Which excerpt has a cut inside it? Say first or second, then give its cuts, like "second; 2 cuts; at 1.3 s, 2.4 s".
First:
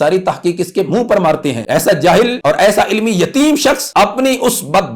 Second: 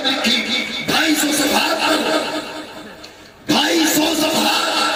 first; 3 cuts; at 1.6 s, 2.4 s, 3.8 s